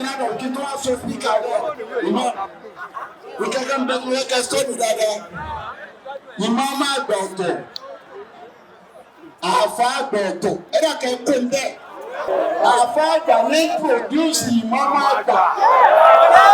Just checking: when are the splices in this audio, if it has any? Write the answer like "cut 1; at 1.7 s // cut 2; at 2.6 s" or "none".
cut 1; at 12.3 s

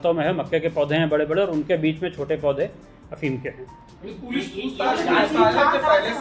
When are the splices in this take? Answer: none

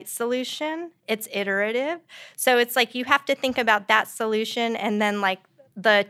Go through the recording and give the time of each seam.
none

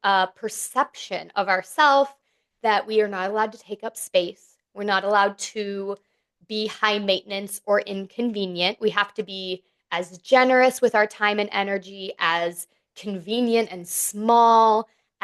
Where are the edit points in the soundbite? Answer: none

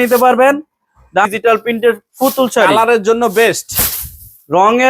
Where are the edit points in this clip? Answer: cut 1; at 1.3 s

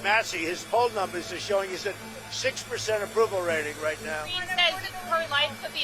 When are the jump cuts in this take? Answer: cut 1; at 4.4 s

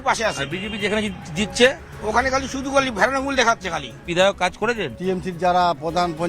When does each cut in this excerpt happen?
cut 1; at 4.0 s // cut 2; at 5.0 s

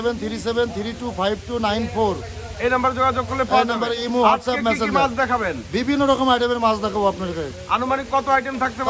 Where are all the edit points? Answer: none

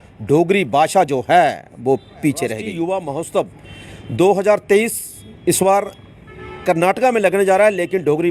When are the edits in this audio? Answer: cut 1; at 2.6 s

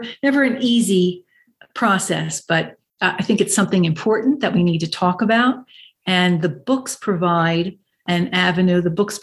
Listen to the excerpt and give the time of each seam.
none

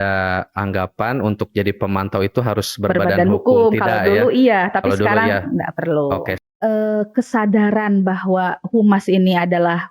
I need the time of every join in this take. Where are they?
cut 1; at 6.4 s

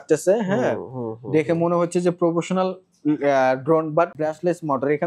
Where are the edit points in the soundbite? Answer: cut 1; at 4.2 s

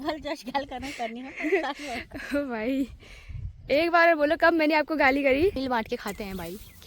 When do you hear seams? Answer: cut 1; at 5.6 s

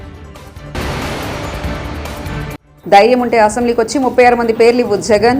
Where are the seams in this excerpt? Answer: cut 1; at 0.7 s // cut 2; at 2.7 s

